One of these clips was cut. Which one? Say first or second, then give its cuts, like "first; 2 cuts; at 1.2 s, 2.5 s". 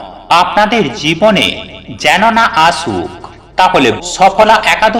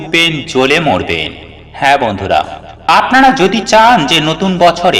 first; 1 cut; at 4.0 s